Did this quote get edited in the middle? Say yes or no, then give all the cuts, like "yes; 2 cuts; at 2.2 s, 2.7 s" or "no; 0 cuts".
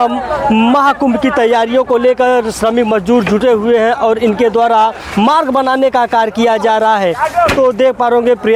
no; 0 cuts